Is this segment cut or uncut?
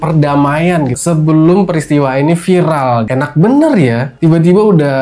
cut